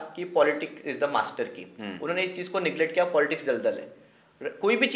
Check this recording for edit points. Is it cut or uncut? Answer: uncut